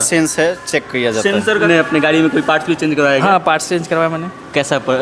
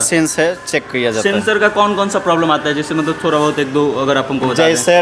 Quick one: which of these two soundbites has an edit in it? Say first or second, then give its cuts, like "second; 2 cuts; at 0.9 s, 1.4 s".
first; 1 cut; at 1.6 s